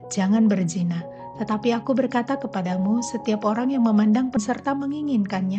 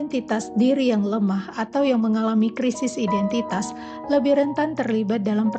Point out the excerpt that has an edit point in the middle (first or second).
first